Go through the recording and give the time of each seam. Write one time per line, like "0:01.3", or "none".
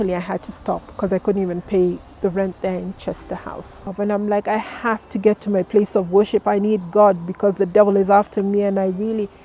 0:03.9